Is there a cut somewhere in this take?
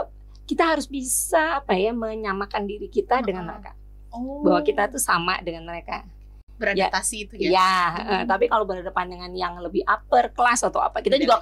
no; 0 cuts

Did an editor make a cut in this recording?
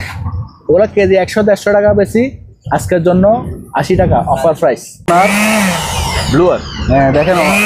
yes; 1 cut; at 4.9 s

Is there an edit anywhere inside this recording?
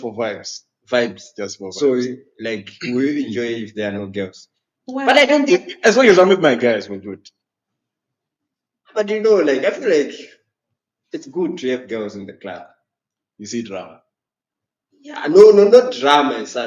no; 0 cuts

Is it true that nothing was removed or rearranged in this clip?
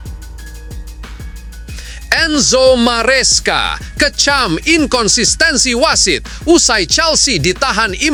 yes; 0 cuts

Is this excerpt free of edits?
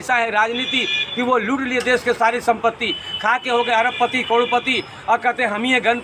yes; 0 cuts

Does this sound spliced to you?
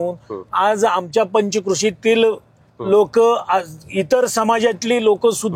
no; 0 cuts

